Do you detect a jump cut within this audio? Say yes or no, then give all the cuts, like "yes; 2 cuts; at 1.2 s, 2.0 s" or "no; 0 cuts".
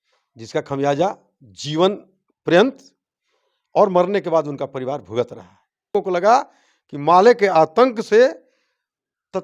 yes; 1 cut; at 6.0 s